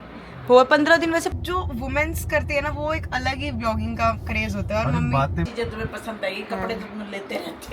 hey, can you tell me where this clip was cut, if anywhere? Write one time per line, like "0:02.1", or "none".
0:01.3
0:05.5